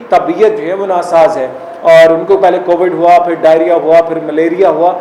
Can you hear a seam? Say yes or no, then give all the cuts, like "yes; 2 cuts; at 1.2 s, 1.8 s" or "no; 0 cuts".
no; 0 cuts